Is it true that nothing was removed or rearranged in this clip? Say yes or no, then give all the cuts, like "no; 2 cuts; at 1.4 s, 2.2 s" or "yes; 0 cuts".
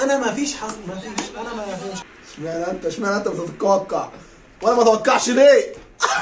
no; 1 cut; at 2.0 s